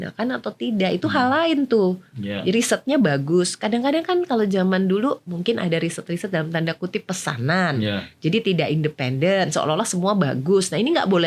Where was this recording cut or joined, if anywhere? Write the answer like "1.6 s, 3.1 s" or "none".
none